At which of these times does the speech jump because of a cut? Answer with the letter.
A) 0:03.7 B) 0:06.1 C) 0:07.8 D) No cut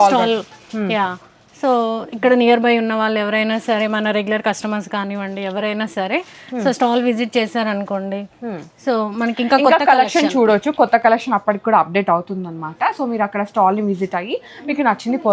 D